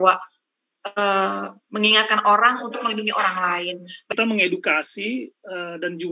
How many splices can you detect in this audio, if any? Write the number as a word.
one